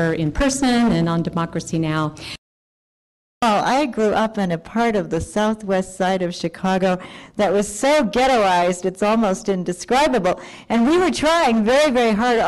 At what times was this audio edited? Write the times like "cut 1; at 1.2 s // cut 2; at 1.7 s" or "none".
none